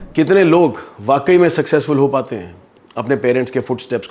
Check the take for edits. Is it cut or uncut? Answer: uncut